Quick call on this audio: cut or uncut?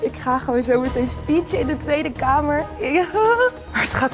cut